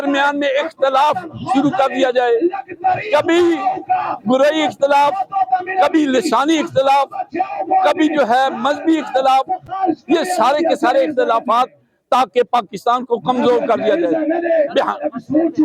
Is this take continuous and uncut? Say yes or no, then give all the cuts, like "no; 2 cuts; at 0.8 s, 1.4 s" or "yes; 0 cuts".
yes; 0 cuts